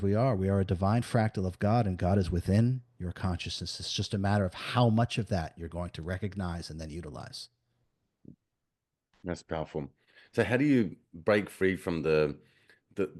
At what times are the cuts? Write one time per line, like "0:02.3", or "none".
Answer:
none